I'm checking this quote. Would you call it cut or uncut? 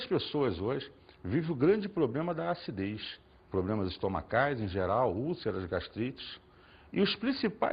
cut